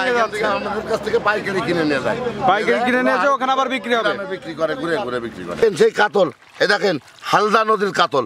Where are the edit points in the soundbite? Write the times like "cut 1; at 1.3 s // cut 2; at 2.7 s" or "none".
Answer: cut 1; at 5.6 s